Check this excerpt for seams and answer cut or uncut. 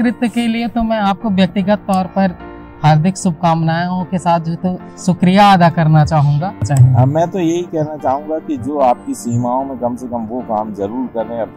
cut